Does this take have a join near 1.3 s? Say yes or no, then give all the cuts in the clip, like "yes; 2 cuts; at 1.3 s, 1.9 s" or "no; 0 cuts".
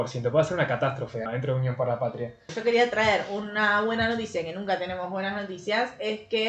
yes; 2 cuts; at 1.3 s, 2.5 s